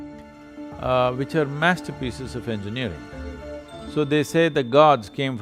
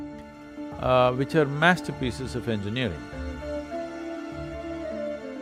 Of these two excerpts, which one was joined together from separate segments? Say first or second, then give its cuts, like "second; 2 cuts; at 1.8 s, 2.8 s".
first; 1 cut; at 3.6 s